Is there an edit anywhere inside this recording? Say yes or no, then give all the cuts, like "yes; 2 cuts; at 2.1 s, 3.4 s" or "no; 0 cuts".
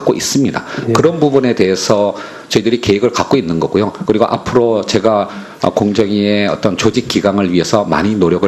yes; 1 cut; at 7.2 s